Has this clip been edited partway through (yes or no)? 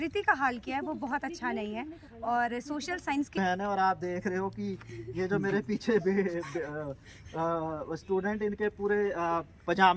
yes